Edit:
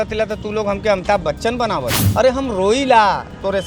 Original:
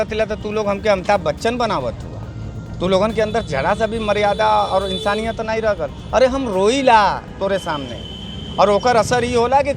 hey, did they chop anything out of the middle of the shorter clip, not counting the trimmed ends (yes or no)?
yes